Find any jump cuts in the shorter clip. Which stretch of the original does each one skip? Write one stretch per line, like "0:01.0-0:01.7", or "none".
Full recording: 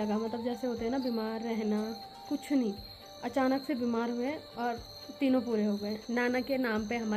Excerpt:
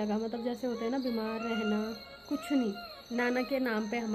0:03.0-0:06.0